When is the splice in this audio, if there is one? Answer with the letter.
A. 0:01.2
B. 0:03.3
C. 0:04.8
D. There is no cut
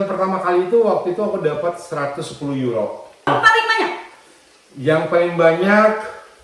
B